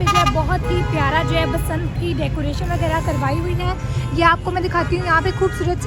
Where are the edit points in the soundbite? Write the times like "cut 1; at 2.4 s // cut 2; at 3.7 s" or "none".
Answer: none